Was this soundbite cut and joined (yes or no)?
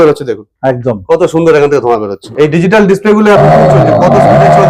yes